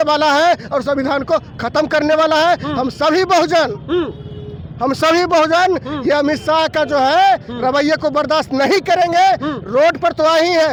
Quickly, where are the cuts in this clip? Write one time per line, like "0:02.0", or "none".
none